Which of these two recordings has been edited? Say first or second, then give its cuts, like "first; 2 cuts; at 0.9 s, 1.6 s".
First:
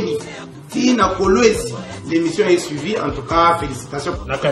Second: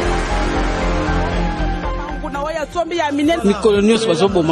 second; 1 cut; at 2.2 s